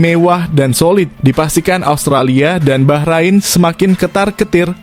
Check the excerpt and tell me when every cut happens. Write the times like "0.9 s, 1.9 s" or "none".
none